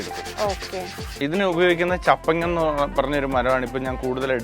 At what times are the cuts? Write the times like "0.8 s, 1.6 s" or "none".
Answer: 1.1 s

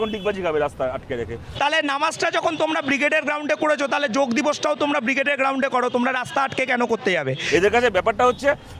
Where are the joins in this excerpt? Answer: 1.4 s, 7.4 s

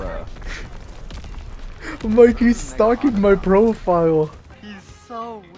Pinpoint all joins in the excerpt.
4.5 s

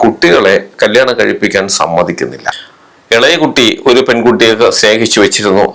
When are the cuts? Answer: 2.7 s

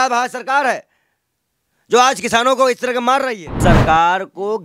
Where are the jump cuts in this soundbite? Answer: 3.6 s

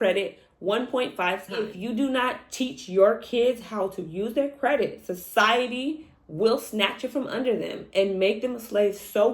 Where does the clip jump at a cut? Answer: 1.7 s

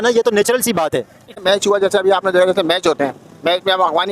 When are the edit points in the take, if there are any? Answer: 1.2 s

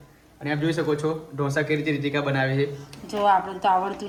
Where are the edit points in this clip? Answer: none

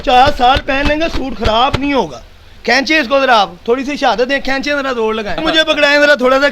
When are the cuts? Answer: 5.4 s

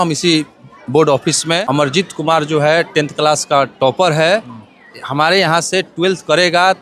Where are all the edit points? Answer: 1.6 s

